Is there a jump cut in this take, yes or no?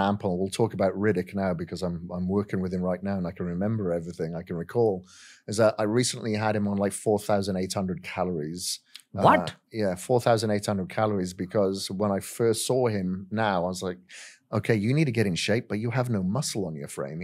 no